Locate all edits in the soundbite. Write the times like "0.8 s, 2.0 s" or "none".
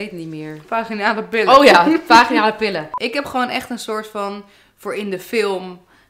2.9 s

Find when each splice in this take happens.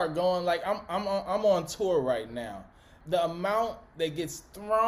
2.9 s

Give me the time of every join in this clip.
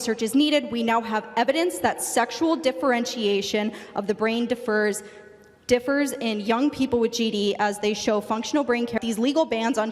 8.9 s

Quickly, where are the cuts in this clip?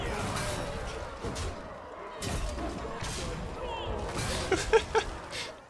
none

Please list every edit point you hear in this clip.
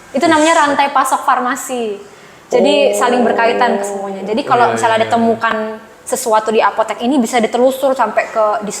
none

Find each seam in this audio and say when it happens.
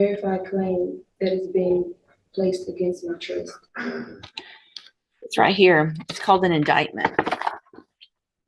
none

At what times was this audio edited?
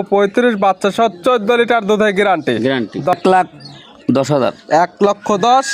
3.1 s

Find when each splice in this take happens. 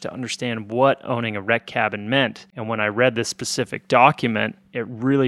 none

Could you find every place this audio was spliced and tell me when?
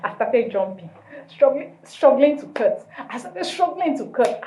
none

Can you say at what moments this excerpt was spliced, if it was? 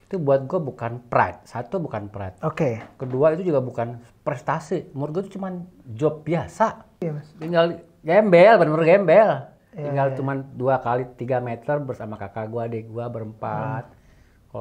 7.0 s

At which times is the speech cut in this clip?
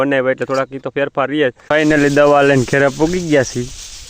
1.6 s

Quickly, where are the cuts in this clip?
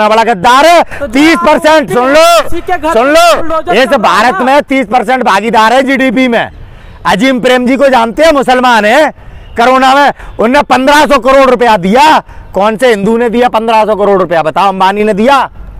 none

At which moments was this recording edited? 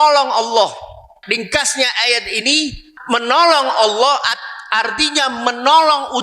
1.1 s, 2.9 s

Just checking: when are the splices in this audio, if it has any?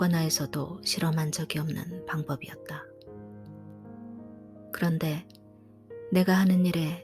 2.6 s, 4.7 s

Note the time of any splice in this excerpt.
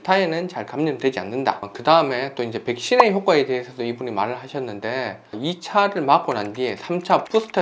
1.7 s

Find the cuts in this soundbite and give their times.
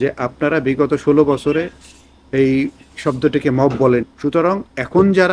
4.1 s

